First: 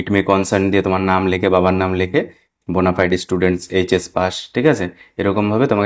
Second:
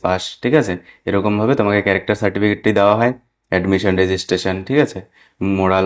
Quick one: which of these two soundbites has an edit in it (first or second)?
first